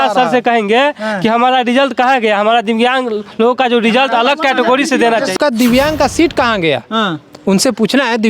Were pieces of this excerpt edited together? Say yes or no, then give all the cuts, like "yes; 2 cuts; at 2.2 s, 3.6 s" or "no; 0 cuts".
yes; 1 cut; at 5.4 s